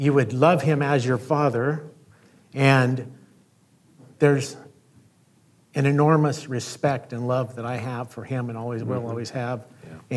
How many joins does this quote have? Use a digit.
1